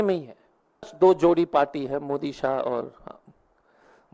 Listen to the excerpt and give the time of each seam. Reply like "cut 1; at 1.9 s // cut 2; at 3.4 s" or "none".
cut 1; at 0.9 s

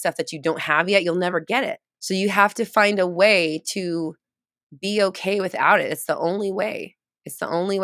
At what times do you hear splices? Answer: none

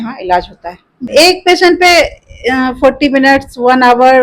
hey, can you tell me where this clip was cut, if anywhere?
cut 1; at 1.1 s

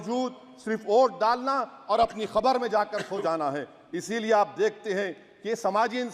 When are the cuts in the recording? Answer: none

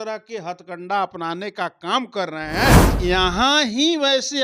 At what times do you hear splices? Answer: cut 1; at 2.9 s

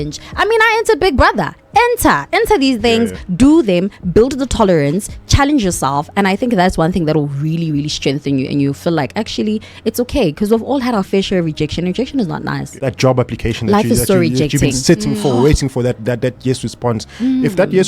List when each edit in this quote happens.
cut 1; at 12.7 s

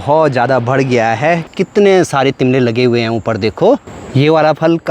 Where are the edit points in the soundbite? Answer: cut 1; at 1.5 s // cut 2; at 4.0 s

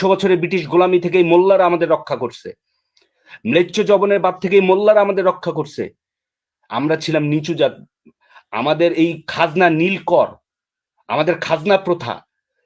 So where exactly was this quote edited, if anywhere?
none

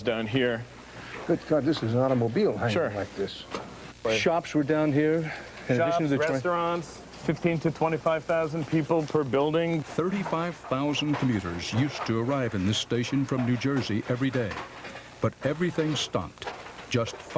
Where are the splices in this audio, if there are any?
cut 1; at 4.0 s // cut 2; at 9.9 s

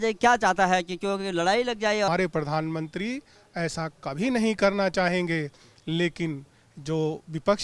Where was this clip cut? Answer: cut 1; at 2.1 s

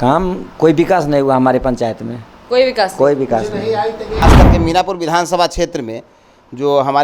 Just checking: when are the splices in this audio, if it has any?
cut 1; at 4.2 s

